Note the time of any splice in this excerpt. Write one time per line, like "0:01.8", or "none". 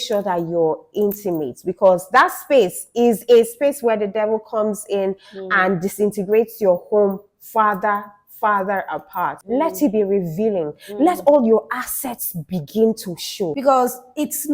0:09.4
0:13.6